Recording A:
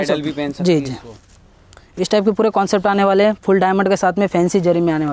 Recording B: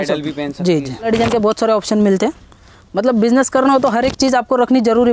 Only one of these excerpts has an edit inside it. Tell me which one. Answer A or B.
B